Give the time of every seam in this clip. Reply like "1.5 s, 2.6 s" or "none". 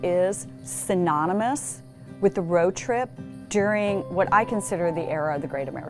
none